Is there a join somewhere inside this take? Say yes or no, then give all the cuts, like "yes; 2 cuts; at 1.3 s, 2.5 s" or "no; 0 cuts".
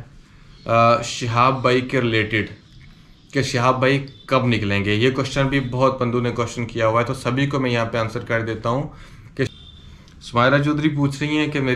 yes; 1 cut; at 9.5 s